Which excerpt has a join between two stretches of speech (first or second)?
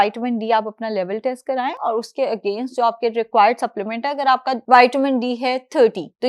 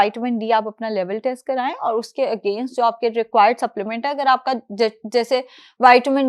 first